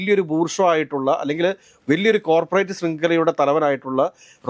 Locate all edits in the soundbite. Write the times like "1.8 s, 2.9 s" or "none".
none